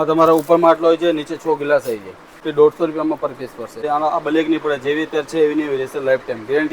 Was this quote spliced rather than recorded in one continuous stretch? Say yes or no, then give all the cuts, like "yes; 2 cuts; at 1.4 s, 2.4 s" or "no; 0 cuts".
yes; 2 cuts; at 2.4 s, 3.8 s